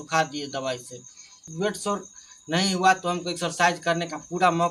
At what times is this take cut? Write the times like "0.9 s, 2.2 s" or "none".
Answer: none